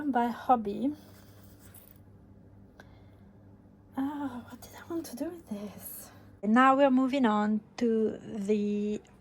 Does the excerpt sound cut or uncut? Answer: cut